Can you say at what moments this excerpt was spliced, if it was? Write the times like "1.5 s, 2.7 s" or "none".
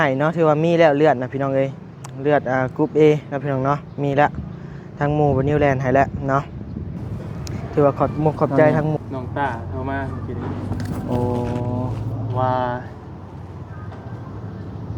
9.0 s